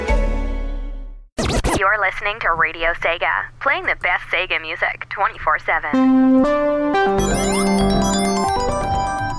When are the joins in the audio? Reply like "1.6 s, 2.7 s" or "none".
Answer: 1.4 s